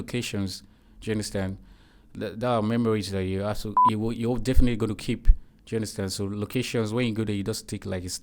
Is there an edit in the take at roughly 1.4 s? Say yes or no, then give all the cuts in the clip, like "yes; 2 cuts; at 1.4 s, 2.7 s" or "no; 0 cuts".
no; 1 cut; at 3.8 s